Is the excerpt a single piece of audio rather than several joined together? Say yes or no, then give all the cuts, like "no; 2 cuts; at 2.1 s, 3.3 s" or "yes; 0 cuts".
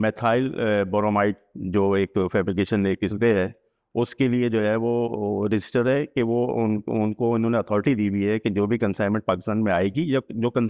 yes; 0 cuts